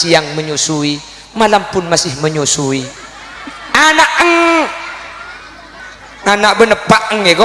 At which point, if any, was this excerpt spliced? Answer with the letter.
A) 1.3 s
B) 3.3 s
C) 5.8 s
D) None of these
C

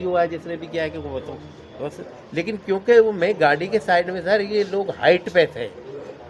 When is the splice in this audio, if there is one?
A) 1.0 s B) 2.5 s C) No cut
C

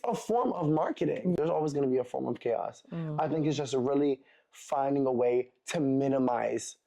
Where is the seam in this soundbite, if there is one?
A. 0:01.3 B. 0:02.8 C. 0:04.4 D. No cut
A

